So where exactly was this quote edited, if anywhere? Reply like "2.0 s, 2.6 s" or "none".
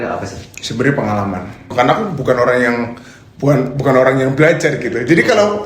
1.7 s